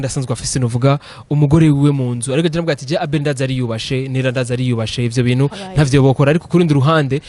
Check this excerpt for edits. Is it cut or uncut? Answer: uncut